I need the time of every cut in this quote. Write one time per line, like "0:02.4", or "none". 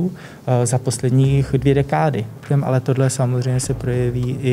0:02.4